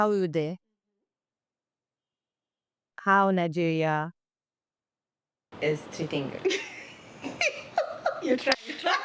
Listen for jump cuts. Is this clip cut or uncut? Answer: uncut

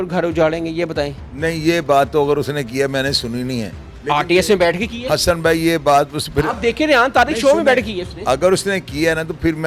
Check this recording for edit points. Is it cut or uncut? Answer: uncut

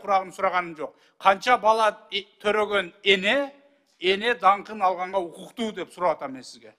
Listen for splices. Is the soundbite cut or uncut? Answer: uncut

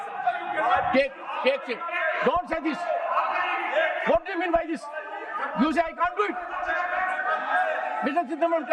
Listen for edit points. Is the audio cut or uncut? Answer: uncut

